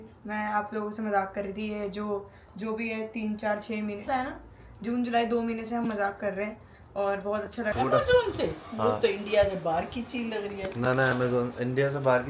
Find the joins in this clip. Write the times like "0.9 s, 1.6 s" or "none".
4.1 s, 7.7 s